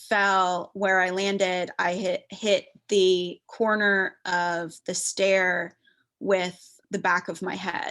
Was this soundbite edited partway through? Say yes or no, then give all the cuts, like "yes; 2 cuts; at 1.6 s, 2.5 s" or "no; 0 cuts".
yes; 1 cut; at 6.8 s